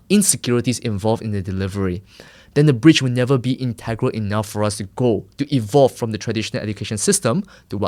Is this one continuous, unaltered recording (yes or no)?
yes